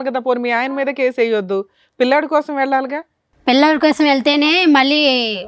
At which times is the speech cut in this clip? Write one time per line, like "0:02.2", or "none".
none